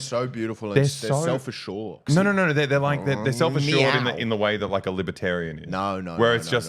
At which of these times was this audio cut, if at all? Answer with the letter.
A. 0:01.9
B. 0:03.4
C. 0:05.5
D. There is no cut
A